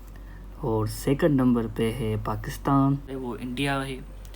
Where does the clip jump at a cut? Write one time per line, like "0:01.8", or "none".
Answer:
0:03.1